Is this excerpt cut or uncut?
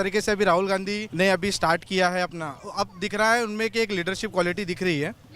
cut